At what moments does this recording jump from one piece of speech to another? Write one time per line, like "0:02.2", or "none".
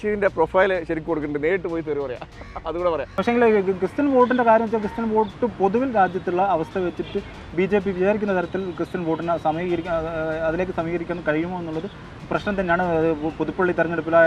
0:03.1